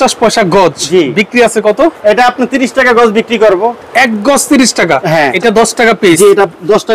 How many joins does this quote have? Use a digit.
1